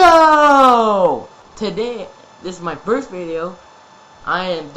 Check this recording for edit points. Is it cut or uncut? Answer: cut